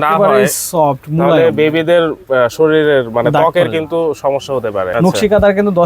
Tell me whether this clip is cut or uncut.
cut